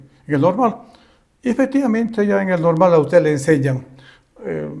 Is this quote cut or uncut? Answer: uncut